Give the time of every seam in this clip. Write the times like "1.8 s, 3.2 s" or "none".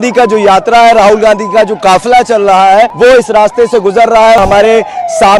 2.9 s, 4.4 s